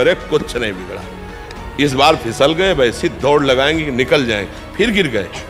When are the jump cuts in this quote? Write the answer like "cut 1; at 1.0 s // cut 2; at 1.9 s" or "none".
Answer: none